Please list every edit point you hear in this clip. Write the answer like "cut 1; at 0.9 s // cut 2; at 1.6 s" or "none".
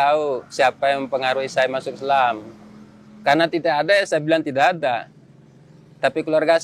none